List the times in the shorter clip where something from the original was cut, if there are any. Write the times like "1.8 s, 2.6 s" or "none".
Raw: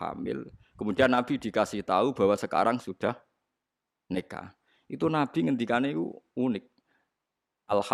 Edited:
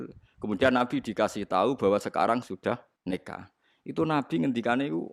2.9 s